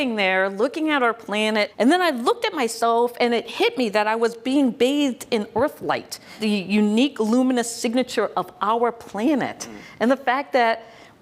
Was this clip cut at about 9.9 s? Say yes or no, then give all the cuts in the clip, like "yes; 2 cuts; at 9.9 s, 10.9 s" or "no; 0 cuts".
no; 2 cuts; at 1.7 s, 6.3 s